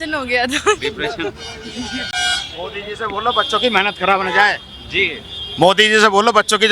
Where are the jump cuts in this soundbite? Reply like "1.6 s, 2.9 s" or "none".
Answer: 2.1 s